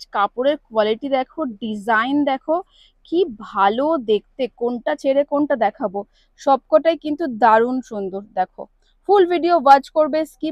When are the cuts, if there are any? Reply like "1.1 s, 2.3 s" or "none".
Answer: none